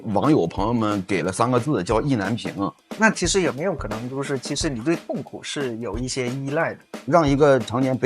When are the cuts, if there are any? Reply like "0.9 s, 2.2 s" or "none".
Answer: 2.8 s, 6.9 s